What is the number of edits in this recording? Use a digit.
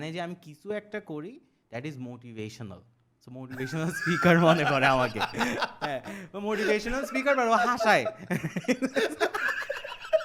0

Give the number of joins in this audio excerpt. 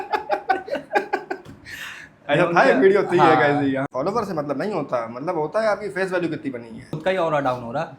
2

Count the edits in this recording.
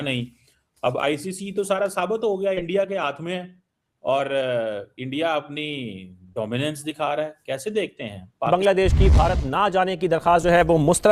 1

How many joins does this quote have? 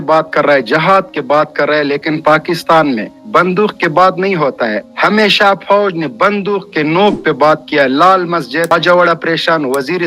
3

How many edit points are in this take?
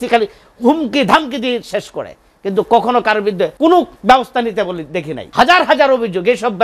2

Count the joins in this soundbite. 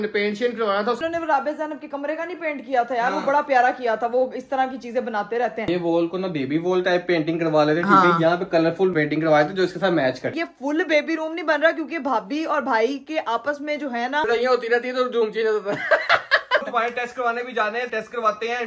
7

